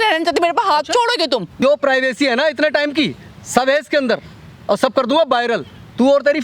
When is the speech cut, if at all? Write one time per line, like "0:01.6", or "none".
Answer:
0:01.6